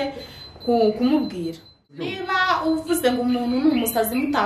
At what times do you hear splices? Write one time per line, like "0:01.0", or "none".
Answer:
0:02.1